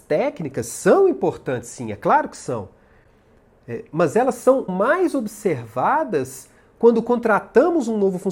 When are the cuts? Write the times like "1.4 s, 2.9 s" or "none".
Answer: 4.7 s